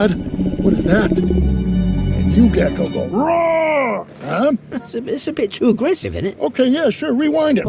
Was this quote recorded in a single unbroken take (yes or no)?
yes